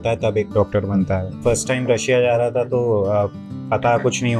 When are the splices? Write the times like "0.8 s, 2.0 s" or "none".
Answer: 1.3 s